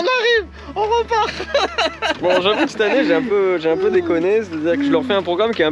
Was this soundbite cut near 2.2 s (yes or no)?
yes